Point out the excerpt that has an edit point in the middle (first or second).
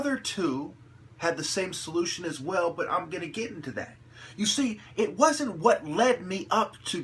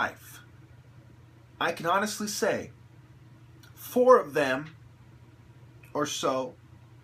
second